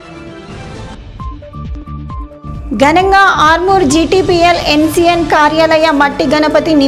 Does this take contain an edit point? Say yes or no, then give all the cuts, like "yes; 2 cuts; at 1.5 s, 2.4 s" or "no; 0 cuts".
yes; 1 cut; at 0.9 s